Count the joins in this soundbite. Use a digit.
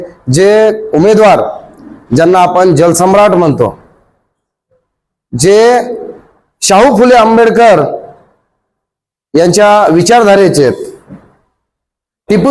0